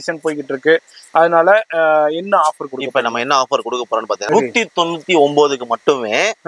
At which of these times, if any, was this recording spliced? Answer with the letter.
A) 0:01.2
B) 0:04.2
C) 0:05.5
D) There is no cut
B